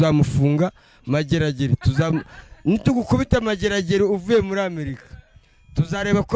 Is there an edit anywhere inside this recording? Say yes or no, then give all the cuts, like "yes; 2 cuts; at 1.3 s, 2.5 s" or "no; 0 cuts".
no; 0 cuts